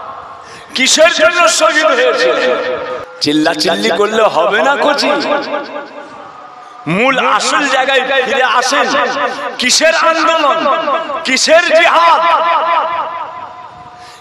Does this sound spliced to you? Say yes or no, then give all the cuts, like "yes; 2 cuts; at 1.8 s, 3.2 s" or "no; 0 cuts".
yes; 1 cut; at 3.0 s